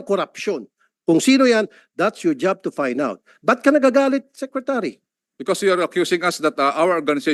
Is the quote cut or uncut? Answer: uncut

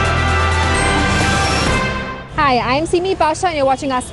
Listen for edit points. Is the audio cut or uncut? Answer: uncut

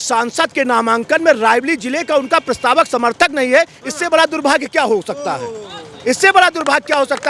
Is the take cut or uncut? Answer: uncut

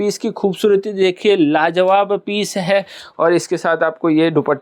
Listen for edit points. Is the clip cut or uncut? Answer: uncut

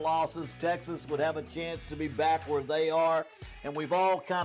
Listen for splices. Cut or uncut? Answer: uncut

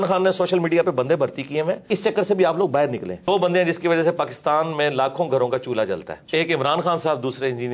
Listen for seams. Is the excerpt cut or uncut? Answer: cut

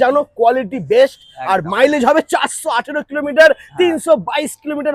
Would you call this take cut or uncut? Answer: uncut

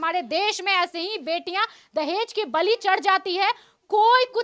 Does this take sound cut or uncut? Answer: uncut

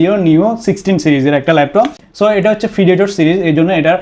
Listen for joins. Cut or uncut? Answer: uncut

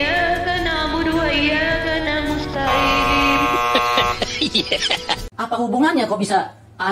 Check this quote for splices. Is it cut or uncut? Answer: cut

